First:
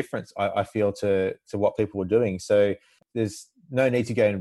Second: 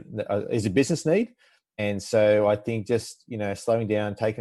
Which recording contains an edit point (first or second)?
first